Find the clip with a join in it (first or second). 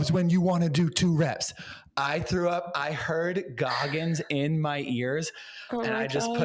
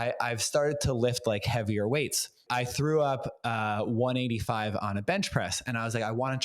second